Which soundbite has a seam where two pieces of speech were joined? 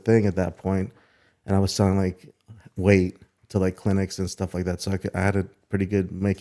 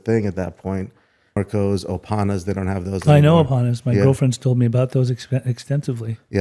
second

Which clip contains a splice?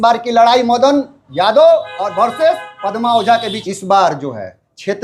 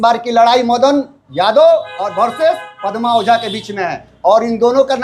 first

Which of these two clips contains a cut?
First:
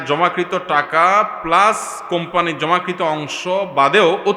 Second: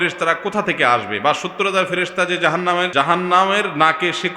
second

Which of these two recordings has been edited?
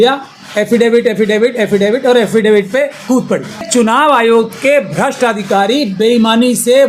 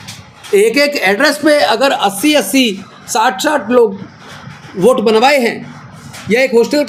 first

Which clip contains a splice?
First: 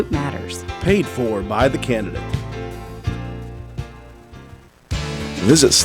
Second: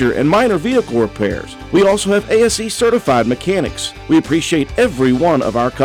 first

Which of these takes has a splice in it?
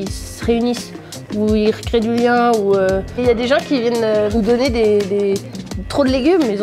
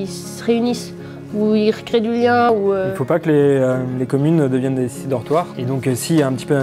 second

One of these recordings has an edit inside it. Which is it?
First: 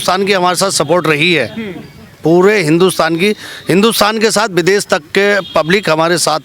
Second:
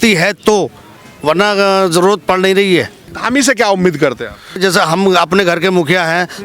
second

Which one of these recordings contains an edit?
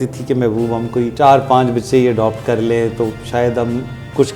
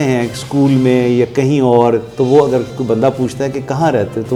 first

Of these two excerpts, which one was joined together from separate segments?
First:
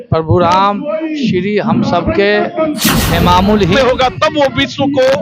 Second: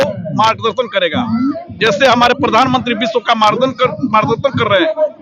first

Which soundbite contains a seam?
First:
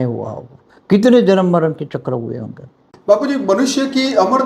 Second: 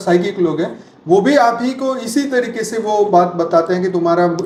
first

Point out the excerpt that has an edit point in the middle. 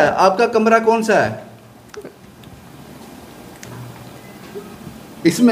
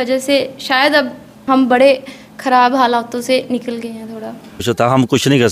second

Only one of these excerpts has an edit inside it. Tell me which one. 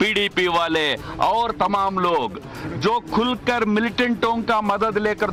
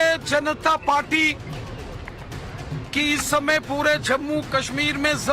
second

